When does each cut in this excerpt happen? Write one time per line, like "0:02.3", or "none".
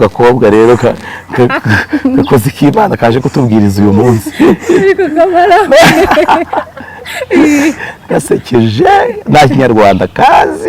none